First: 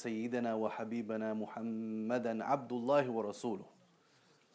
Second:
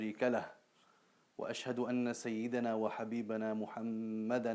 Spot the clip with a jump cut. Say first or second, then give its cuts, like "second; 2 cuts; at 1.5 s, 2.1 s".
first; 1 cut; at 3.6 s